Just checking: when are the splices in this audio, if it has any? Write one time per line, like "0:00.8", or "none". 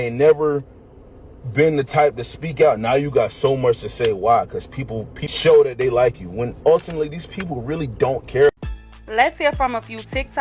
none